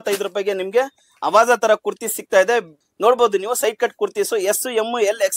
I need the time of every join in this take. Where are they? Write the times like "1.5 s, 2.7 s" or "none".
2.8 s